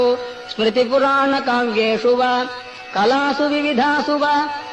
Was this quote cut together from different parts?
no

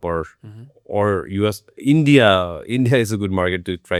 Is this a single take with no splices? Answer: yes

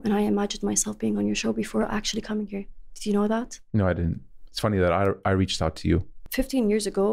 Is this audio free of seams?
no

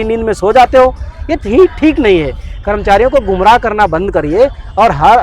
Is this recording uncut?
yes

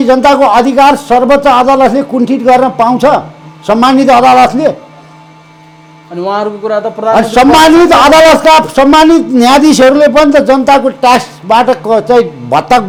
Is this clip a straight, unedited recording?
yes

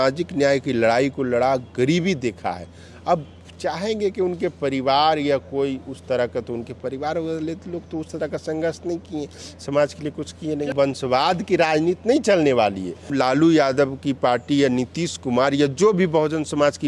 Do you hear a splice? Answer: yes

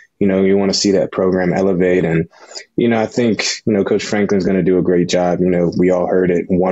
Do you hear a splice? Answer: no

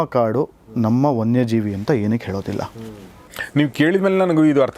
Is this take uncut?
yes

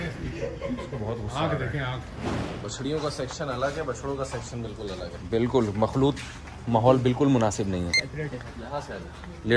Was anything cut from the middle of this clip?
yes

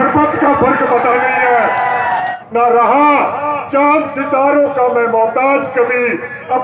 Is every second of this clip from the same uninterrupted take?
no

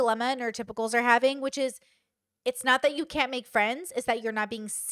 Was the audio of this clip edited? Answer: no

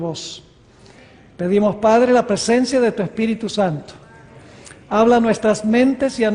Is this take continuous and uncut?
yes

